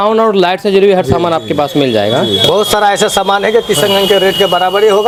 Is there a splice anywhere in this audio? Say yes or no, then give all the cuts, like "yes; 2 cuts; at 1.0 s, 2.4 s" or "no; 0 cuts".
no; 0 cuts